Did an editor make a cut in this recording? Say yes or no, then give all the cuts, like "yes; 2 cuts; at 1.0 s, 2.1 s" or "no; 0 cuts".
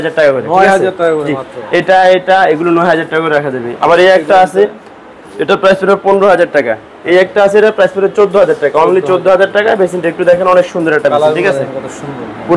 no; 0 cuts